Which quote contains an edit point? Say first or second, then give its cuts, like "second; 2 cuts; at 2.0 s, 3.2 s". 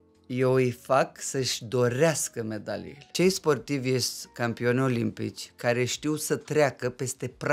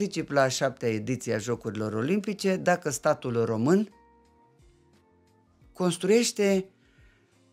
first; 1 cut; at 3.1 s